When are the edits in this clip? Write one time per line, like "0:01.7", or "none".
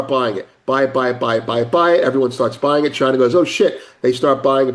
none